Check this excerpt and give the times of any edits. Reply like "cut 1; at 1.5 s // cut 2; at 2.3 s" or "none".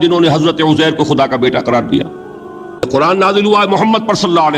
cut 1; at 2.8 s